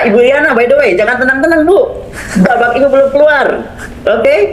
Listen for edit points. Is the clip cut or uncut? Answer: uncut